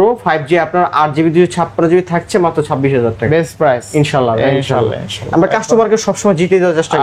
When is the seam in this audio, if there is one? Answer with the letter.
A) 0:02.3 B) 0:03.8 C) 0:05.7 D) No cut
D